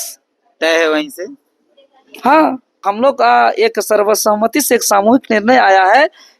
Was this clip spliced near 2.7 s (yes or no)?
yes